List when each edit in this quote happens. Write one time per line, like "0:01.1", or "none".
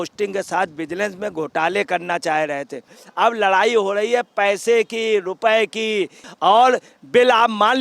0:03.0
0:06.2